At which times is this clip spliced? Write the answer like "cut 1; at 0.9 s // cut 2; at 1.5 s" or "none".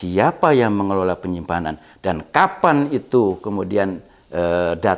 none